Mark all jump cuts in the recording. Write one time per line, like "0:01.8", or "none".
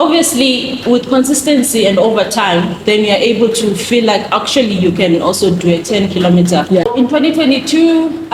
0:06.9